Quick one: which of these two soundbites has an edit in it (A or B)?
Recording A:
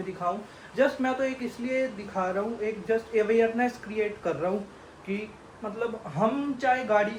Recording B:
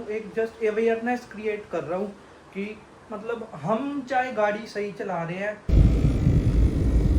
B